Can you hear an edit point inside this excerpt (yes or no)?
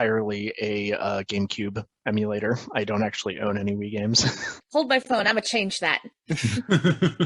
yes